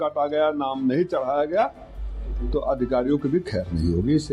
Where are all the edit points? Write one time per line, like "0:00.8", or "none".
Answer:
none